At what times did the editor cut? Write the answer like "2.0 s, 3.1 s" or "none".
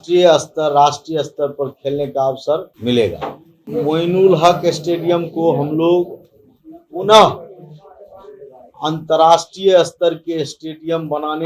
2.7 s, 3.6 s

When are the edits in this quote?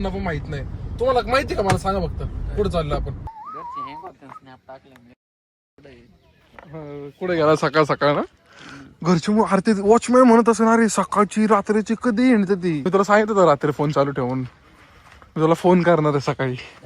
3.4 s, 12.9 s

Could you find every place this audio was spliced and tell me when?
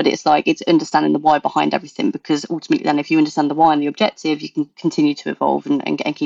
none

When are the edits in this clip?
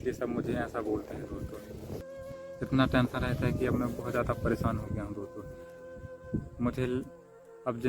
2.0 s

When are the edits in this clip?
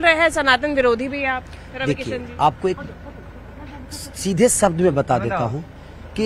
none

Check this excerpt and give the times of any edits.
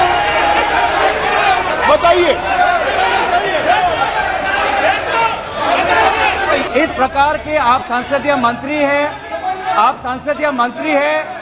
none

